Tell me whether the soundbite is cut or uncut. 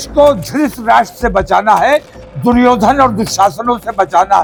uncut